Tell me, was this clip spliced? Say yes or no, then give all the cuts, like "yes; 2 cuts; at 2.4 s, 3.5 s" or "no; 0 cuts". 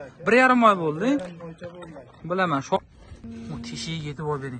yes; 1 cut; at 2.8 s